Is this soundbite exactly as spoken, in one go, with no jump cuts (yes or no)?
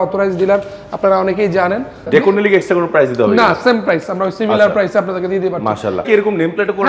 no